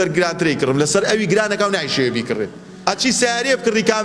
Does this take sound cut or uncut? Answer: cut